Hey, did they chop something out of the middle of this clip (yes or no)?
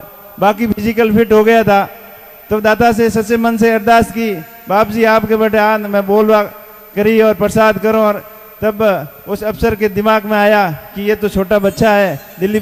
no